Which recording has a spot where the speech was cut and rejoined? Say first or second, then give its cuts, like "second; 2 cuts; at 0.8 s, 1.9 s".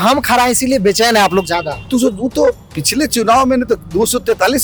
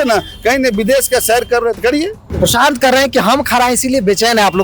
second; 1 cut; at 2.3 s